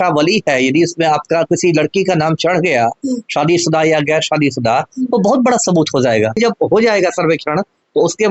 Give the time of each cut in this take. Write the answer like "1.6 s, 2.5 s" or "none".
6.4 s